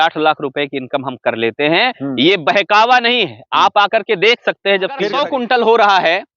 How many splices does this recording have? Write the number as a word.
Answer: one